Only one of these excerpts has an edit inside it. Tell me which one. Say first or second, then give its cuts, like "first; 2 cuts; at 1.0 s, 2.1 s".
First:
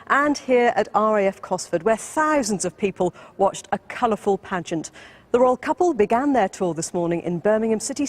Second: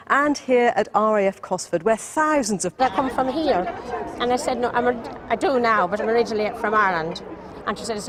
first; 1 cut; at 2.8 s